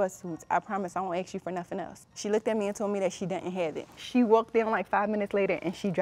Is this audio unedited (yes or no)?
no